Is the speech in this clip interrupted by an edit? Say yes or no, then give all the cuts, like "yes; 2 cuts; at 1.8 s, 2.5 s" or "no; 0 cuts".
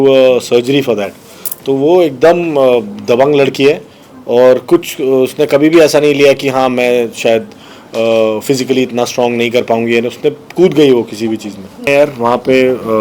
yes; 1 cut; at 11.9 s